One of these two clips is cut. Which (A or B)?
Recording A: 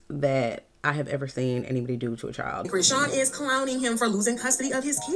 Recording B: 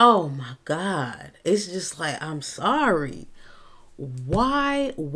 A